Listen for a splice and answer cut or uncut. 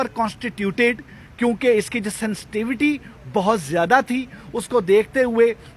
uncut